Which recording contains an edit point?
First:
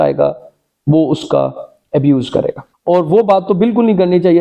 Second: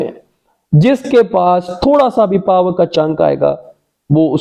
first; 1 cut; at 2.6 s

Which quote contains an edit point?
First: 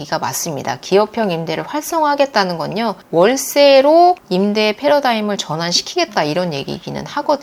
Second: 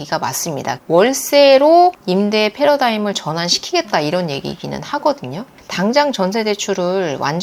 second; 2 cuts; at 0.8 s, 5.6 s

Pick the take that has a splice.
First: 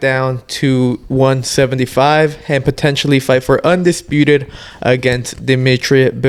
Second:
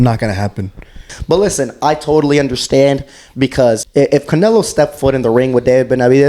second; 2 cuts; at 1.1 s, 3.8 s

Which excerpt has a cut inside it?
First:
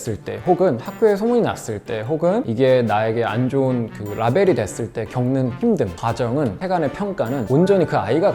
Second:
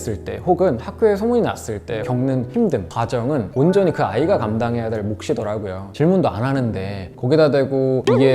second; 3 cuts; at 1.9 s, 3.5 s, 5.8 s

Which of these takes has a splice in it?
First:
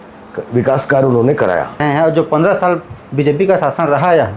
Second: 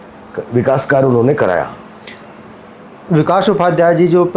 first; 1 cut; at 1.8 s

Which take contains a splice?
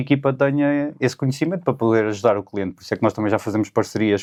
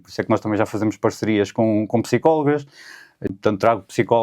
second; 1 cut; at 3.3 s

